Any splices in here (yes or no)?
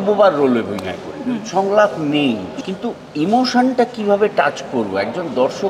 yes